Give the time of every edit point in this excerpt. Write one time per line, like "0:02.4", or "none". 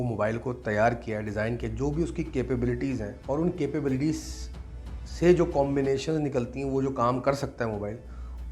0:03.1